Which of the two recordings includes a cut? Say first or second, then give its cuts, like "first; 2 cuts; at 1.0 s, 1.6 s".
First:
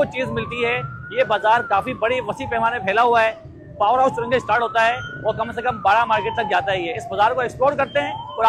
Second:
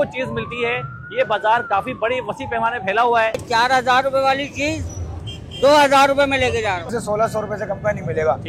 second; 2 cuts; at 3.4 s, 6.9 s